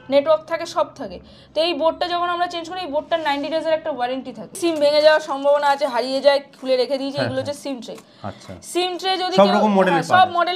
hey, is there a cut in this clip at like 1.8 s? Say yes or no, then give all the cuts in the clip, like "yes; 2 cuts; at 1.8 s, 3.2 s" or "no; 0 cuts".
no; 1 cut; at 4.6 s